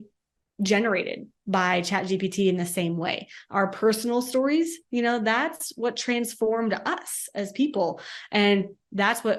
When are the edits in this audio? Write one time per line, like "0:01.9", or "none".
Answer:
none

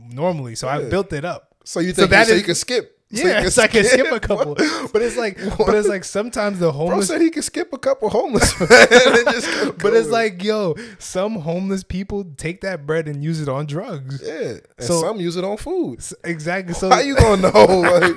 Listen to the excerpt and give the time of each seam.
none

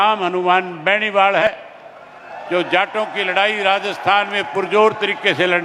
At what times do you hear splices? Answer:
0:01.4

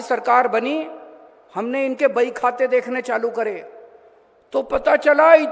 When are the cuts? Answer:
none

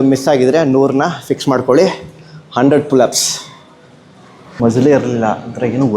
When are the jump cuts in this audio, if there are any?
0:04.5

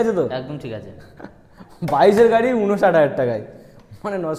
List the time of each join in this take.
none

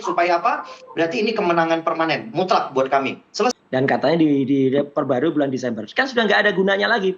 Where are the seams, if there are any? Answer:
0:03.5

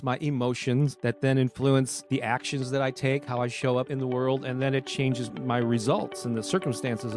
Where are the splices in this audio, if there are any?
0:01.0
0:02.0
0:03.9

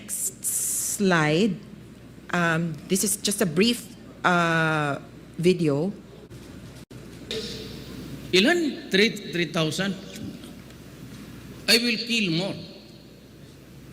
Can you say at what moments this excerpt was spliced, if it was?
0:06.3

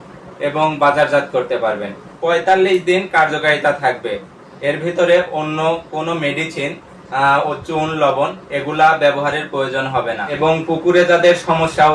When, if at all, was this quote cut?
0:02.1
0:10.3

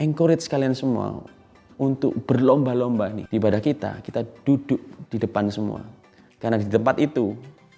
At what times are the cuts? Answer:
0:03.2

